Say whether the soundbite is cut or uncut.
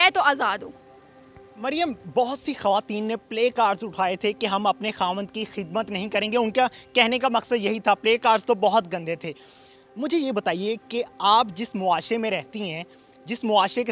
uncut